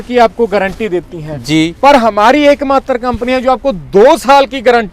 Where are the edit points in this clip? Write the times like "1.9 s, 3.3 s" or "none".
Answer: none